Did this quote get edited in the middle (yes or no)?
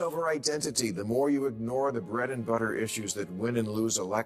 no